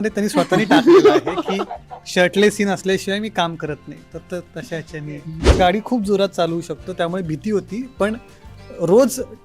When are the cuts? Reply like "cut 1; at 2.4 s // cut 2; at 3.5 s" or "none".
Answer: cut 1; at 5.5 s